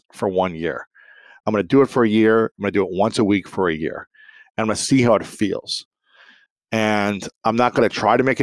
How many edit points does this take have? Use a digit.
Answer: 0